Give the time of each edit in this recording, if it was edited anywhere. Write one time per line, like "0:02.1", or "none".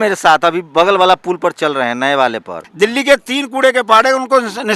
0:02.6